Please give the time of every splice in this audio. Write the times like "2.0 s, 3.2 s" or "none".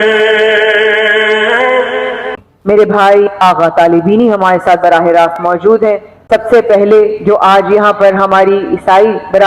2.4 s, 6.1 s